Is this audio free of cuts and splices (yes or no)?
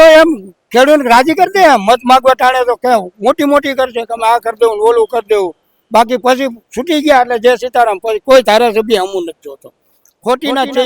yes